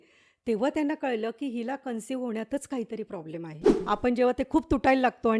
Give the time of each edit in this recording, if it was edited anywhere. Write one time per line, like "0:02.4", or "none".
0:03.8